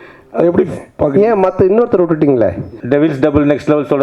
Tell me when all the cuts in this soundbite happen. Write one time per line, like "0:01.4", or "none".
0:02.8